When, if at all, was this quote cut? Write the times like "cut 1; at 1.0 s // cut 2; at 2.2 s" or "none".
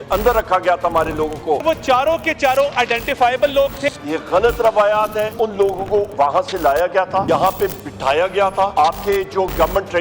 cut 1; at 1.6 s // cut 2; at 3.8 s // cut 3; at 5.3 s // cut 4; at 7.2 s // cut 5; at 8.7 s